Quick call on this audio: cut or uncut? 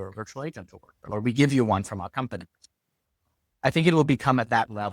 cut